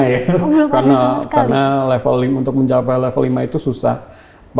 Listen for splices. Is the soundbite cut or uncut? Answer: uncut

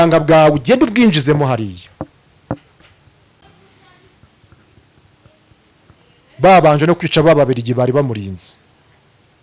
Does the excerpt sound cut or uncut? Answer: cut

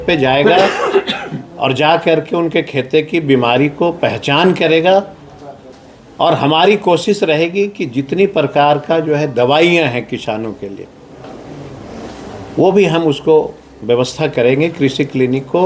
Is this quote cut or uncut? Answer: uncut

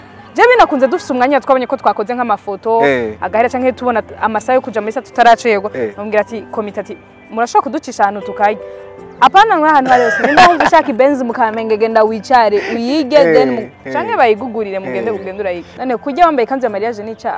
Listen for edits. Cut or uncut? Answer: cut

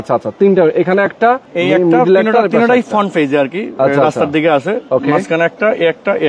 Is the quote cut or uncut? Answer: uncut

